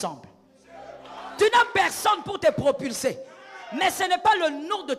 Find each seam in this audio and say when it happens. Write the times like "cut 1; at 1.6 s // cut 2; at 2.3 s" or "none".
cut 1; at 1.3 s